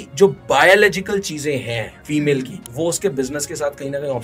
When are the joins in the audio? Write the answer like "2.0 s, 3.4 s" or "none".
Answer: 1.9 s, 2.6 s